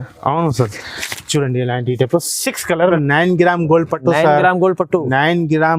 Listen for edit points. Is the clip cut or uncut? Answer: cut